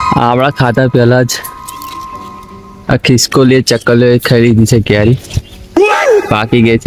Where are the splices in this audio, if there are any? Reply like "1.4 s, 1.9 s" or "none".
none